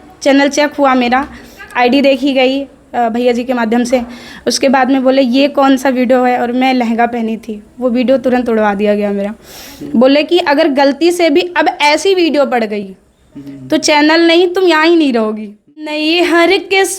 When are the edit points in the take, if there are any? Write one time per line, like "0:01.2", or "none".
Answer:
0:16.1